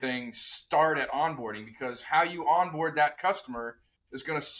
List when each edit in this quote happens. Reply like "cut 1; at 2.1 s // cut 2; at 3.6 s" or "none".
none